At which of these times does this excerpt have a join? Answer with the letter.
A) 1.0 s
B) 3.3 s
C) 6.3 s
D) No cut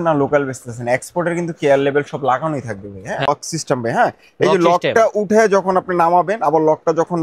B